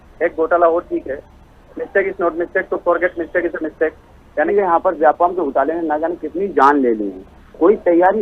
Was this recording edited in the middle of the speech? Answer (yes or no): yes